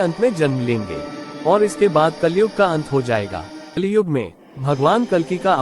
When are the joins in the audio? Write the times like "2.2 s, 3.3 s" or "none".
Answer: 3.8 s